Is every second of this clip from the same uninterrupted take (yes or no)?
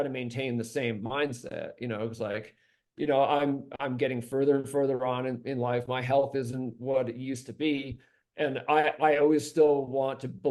yes